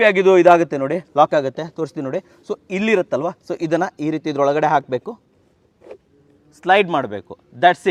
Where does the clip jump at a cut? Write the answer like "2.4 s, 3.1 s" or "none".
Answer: none